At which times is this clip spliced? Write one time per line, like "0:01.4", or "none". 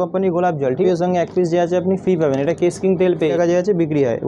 0:00.8
0:03.3